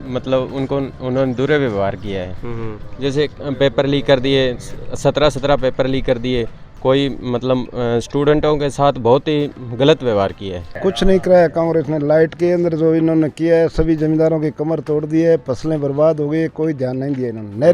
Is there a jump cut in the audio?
yes; 1 cut; at 10.6 s

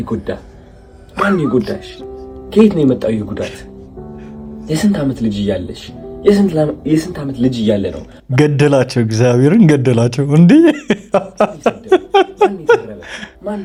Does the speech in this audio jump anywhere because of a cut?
no; 0 cuts

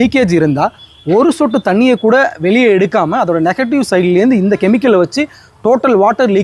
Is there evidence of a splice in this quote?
no; 0 cuts

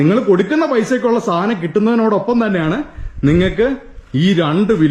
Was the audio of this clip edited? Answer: no; 0 cuts

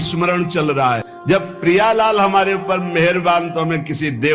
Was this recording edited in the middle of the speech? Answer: yes; 1 cut; at 1.1 s

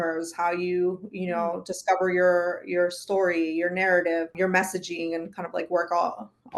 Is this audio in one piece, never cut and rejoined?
no; 1 cut; at 4.3 s

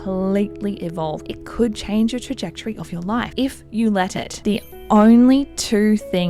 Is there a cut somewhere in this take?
yes; 3 cuts; at 1.2 s, 3.3 s, 4.4 s

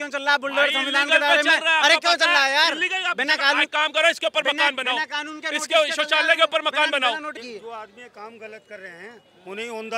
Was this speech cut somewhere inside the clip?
yes; 1 cut; at 7.4 s

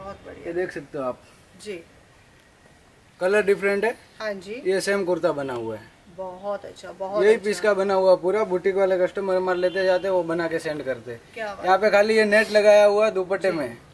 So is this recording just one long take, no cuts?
yes; 0 cuts

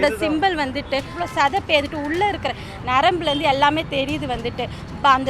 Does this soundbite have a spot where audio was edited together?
yes; 1 cut; at 1.2 s

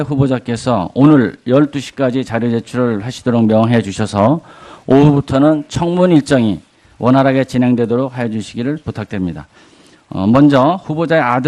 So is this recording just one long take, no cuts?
yes; 0 cuts

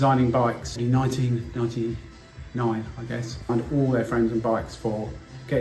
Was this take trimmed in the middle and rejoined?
yes; 2 cuts; at 0.8 s, 3.5 s

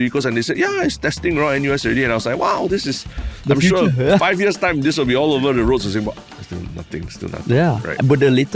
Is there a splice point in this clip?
no; 0 cuts

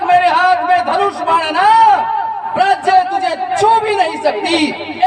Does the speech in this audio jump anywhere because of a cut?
no; 0 cuts

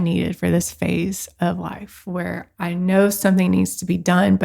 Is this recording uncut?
yes; 0 cuts

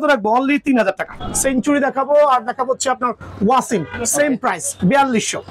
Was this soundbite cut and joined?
yes; 1 cut; at 1.2 s

